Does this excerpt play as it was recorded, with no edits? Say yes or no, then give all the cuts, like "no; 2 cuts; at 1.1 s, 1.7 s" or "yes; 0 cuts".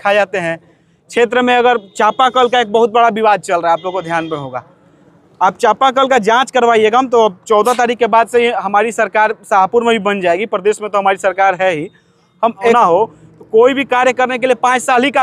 no; 1 cut; at 12.7 s